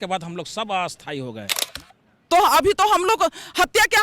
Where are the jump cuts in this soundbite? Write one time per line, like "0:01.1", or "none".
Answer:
0:01.6